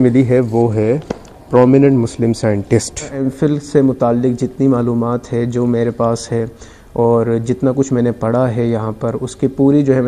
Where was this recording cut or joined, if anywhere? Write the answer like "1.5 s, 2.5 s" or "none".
3.2 s